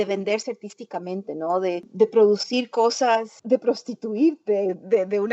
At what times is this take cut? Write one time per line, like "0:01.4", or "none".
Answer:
0:01.9
0:03.3